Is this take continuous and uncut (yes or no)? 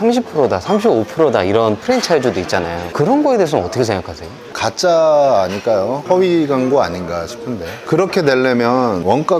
yes